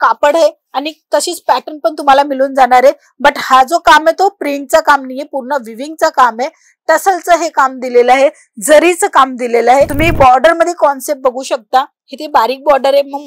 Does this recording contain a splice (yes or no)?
yes